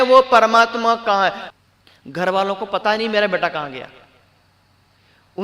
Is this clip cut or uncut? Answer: cut